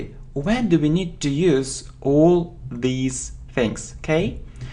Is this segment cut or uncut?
cut